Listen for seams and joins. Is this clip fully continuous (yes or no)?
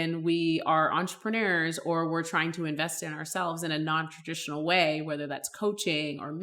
yes